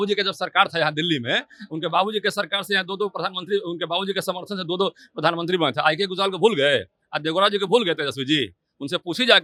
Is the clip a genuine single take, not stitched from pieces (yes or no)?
yes